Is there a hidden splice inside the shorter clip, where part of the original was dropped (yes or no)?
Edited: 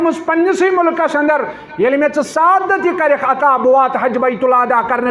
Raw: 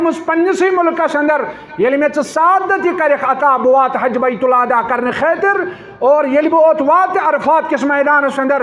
no